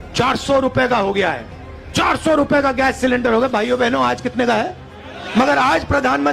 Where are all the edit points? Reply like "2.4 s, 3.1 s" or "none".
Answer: 5.4 s